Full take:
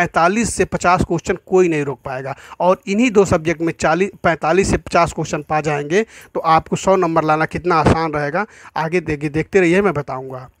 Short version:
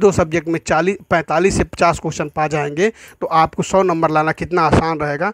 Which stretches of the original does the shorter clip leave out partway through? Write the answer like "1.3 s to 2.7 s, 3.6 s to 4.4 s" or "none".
none